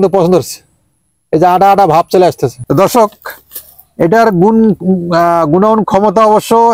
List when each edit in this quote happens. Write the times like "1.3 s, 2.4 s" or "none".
2.6 s